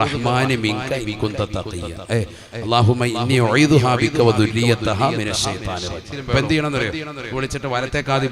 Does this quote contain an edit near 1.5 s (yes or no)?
no